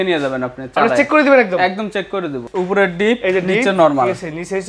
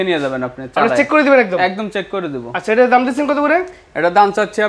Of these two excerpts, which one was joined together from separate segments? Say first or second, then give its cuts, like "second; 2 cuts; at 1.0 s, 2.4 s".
first; 1 cut; at 2.5 s